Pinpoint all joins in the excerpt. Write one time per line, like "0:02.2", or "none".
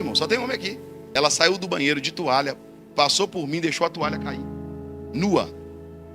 0:00.9